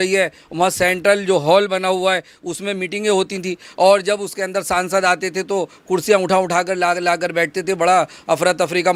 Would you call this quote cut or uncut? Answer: uncut